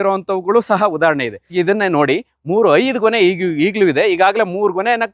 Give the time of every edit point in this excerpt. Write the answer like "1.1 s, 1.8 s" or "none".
1.4 s